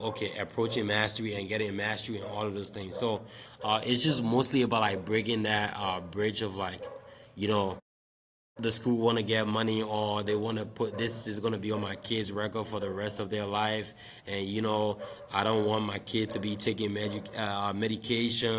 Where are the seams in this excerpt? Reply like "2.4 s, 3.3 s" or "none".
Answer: none